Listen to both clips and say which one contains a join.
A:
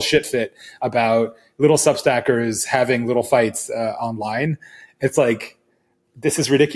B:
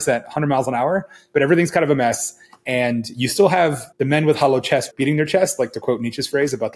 B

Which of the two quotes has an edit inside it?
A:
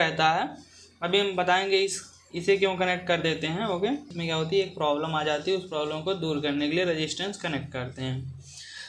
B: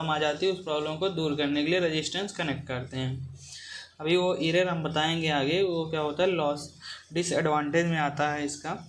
A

